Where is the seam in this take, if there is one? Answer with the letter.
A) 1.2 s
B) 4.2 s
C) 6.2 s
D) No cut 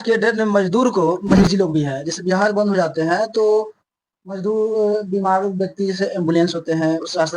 A